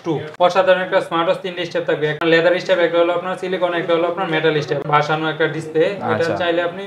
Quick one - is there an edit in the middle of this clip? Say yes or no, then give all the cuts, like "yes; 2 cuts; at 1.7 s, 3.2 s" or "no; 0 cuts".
yes; 2 cuts; at 2.1 s, 4.8 s